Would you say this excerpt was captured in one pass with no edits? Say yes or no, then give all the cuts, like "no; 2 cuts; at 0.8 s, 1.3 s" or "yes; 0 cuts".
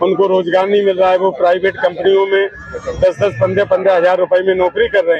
yes; 0 cuts